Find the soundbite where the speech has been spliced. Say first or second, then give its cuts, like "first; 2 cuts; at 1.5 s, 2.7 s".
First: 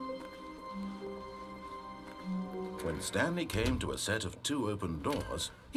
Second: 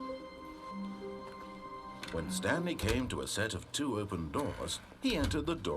second; 1 cut; at 2.2 s